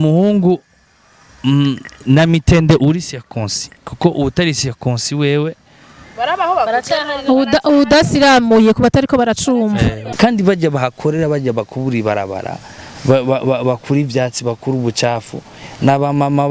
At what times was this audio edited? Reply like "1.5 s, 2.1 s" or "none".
10.0 s